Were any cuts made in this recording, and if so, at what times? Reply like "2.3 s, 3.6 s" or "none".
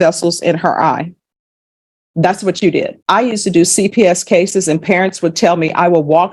3.0 s